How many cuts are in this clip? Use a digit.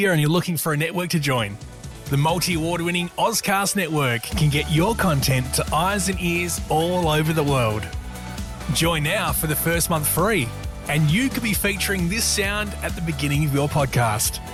0